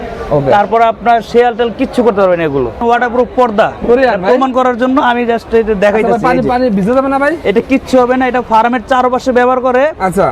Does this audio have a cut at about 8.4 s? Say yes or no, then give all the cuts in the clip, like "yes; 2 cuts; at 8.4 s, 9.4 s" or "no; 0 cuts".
no; 1 cut; at 2.8 s